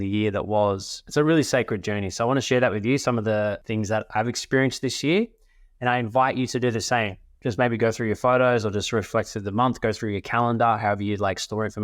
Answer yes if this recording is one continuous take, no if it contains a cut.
no